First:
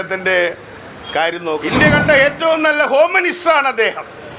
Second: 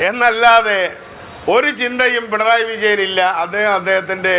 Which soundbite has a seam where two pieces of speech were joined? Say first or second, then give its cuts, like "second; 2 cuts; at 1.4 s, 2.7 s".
first; 1 cut; at 1.6 s